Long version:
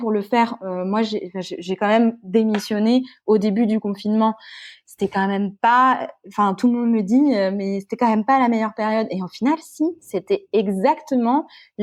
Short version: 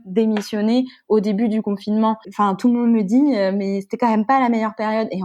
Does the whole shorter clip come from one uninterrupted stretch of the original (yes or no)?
no